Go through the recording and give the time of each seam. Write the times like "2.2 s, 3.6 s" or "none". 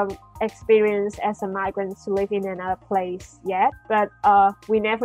3.8 s